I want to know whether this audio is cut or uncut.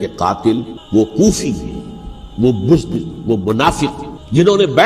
cut